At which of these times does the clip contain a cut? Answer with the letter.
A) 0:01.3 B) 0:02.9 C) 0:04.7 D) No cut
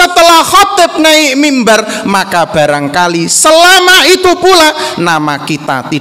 D